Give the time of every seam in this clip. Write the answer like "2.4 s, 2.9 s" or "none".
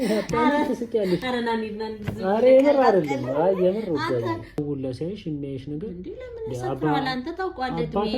4.6 s